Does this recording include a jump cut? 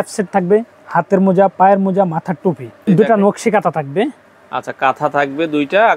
yes; 1 cut; at 2.7 s

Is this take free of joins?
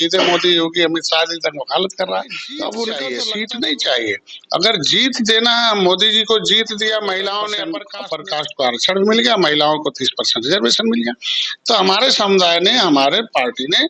no; 2 cuts; at 3.1 s, 7.9 s

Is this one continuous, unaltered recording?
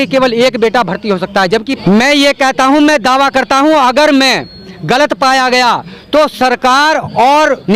no; 1 cut; at 1.7 s

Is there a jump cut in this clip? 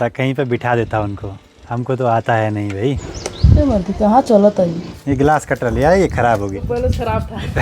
no; 0 cuts

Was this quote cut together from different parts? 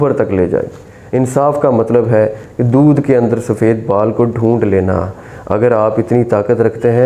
yes; 1 cut; at 0.9 s

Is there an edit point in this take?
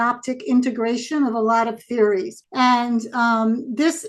yes; 1 cut; at 2.4 s

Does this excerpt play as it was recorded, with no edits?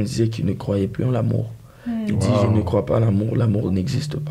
yes; 0 cuts

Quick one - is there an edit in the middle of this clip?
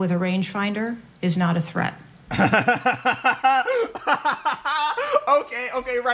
no; 0 cuts

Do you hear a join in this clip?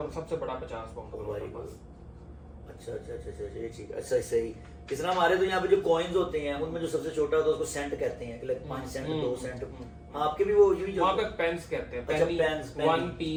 no; 0 cuts

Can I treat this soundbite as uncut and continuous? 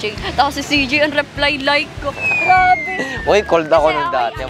yes; 0 cuts

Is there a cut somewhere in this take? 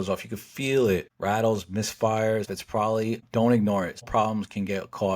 yes; 3 cuts; at 1.1 s, 2.7 s, 4.1 s

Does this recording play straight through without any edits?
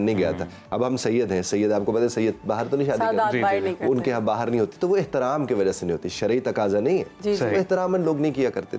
yes; 0 cuts

